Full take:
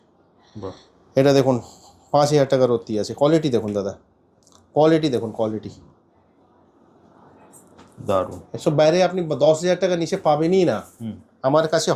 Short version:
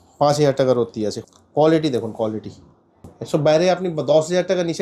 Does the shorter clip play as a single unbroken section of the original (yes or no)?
no